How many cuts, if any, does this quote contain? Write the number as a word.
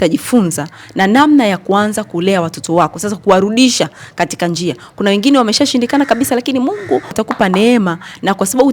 one